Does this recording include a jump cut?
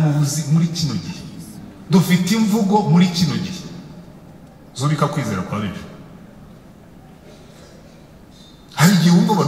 no; 0 cuts

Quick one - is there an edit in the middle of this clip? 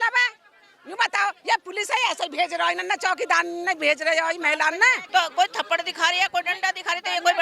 yes; 1 cut; at 5.0 s

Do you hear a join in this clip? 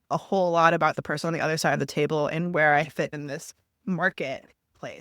yes; 1 cut; at 3.1 s

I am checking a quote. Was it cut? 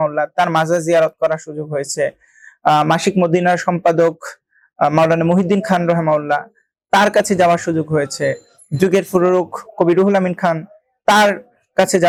no; 0 cuts

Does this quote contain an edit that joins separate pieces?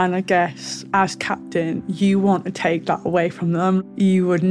no; 0 cuts

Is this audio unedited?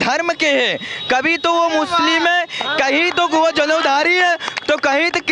yes; 0 cuts

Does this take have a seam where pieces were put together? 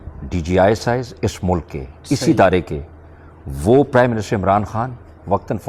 no; 0 cuts

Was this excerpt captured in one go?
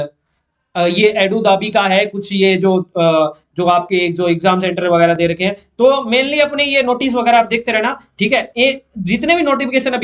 yes; 0 cuts

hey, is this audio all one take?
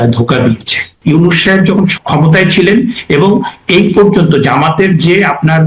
no; 2 cuts; at 0.9 s, 2.0 s

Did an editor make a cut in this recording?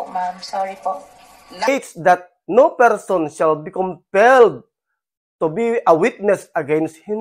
yes; 1 cut; at 1.7 s

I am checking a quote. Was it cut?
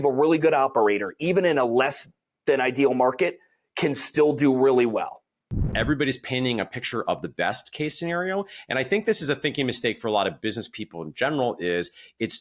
yes; 1 cut; at 5.7 s

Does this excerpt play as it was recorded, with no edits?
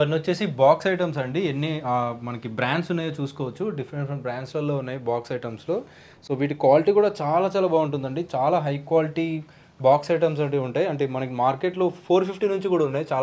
yes; 0 cuts

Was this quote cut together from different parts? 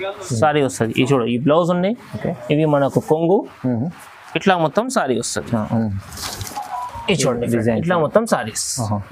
no; 0 cuts

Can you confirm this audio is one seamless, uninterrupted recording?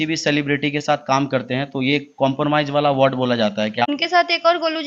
no; 1 cut; at 3.9 s

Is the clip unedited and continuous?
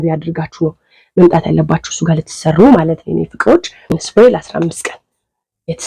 no; 1 cut; at 4.0 s

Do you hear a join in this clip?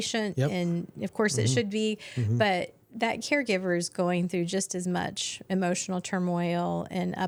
no; 0 cuts

